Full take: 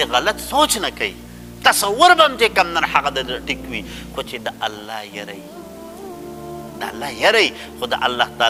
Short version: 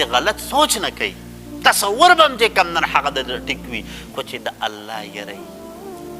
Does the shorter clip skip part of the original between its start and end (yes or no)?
yes